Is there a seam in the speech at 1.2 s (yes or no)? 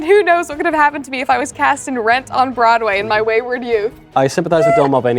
no